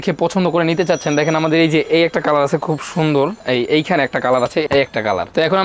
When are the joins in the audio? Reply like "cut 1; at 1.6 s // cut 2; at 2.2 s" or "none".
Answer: cut 1; at 4.6 s